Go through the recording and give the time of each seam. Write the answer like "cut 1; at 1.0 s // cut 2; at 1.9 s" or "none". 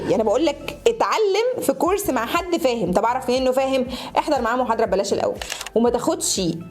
cut 1; at 5.5 s